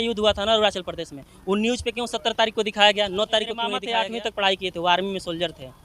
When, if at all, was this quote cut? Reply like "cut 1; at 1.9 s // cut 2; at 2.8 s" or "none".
cut 1; at 3.8 s